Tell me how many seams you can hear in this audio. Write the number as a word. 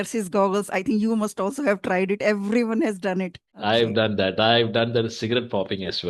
one